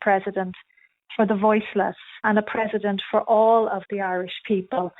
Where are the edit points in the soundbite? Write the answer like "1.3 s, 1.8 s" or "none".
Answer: 2.2 s